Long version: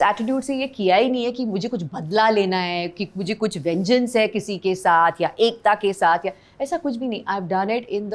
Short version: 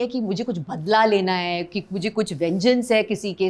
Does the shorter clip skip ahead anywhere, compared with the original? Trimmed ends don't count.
no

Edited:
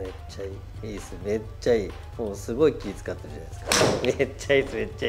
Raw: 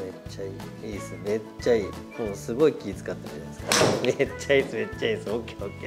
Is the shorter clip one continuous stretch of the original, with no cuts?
yes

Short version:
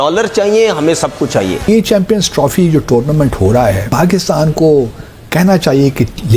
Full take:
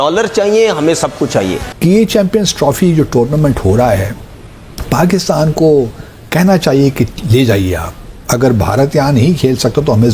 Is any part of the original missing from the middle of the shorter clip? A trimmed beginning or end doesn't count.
yes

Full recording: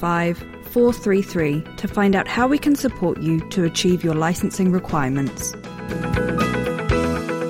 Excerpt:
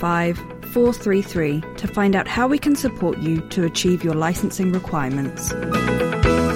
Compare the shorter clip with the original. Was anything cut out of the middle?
yes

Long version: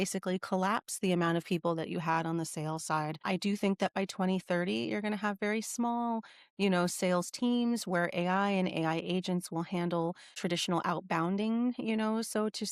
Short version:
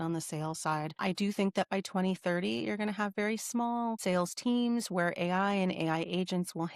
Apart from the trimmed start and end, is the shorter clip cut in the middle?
yes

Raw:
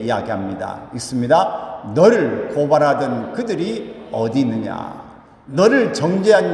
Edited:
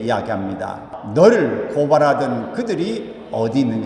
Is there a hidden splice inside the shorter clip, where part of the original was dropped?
yes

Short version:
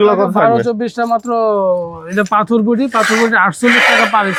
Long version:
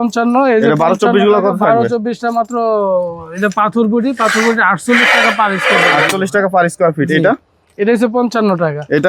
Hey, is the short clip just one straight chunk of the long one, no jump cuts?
yes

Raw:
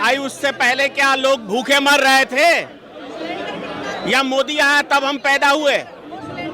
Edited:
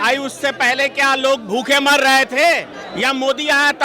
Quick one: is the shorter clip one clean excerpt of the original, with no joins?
no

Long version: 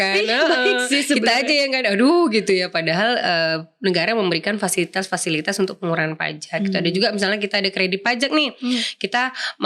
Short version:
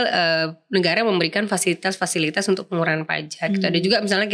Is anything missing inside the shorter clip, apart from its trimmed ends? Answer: no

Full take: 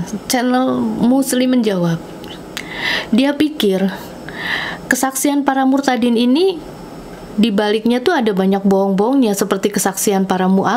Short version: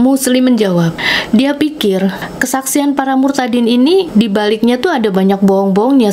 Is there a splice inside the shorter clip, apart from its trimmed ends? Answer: yes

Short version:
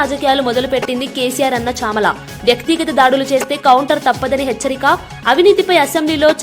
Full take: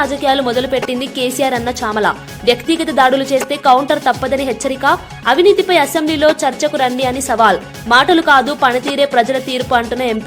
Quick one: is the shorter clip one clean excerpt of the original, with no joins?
yes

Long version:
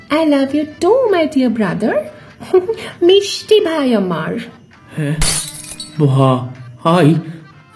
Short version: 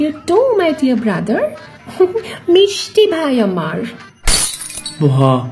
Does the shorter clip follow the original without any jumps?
no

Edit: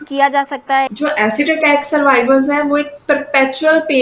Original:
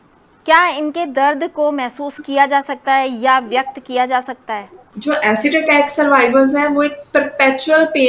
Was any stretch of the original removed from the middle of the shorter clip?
yes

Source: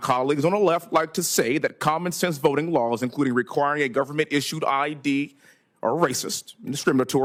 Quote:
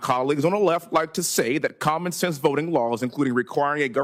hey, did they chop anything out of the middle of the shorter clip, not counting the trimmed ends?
no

